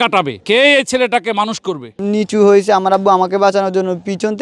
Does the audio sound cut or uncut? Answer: cut